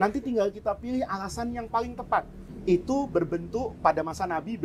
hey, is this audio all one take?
yes; 0 cuts

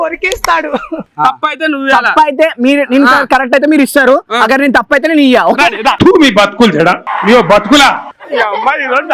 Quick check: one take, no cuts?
no; 1 cut; at 1.0 s

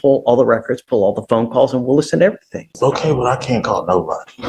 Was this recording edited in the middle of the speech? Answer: yes; 1 cut; at 2.7 s

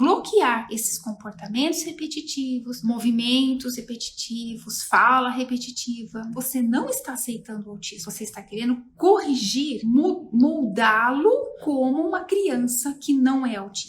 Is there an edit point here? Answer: yes; 2 cuts; at 6.3 s, 9.7 s

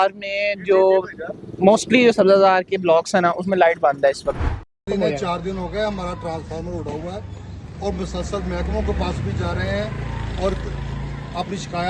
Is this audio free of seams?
no; 1 cut; at 4.4 s

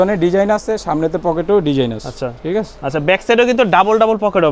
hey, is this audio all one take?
no; 1 cut; at 2.8 s

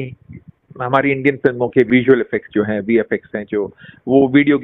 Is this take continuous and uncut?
no; 1 cut; at 1.9 s

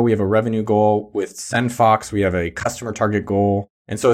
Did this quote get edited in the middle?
no; 0 cuts

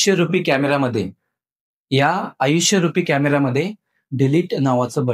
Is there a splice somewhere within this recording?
no; 0 cuts

